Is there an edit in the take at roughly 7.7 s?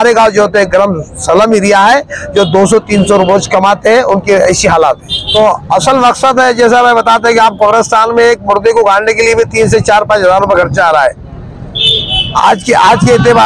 no; 1 cut; at 5.1 s

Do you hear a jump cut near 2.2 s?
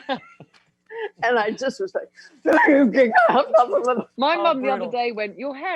no; 1 cut; at 4.1 s

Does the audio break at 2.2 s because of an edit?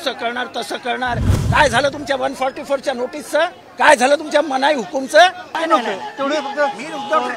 no; 2 cuts; at 3.6 s, 5.6 s

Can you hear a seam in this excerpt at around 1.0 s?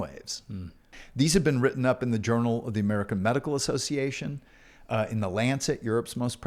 yes; 1 cut; at 1.0 s

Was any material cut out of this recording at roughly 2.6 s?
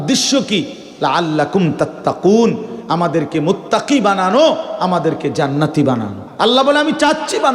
no; 1 cut; at 6.2 s

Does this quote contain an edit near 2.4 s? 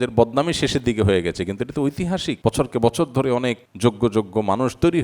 yes; 2 cuts; at 2.4 s, 3.7 s

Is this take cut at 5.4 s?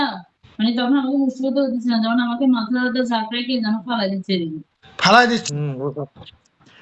no; 0 cuts

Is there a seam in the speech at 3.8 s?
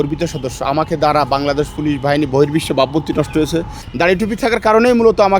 yes; 1 cut; at 3.8 s

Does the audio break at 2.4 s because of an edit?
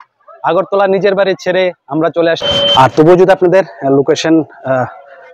yes; 1 cut; at 2.4 s

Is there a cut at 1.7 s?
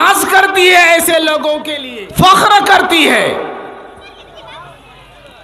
yes; 1 cut; at 1.7 s

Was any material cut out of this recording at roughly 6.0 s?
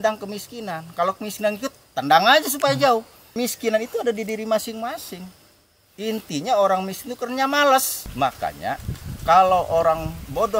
no; 2 cuts; at 3.3 s, 8.0 s

